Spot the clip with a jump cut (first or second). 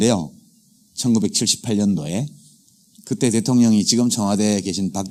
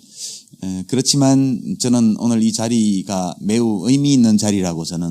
second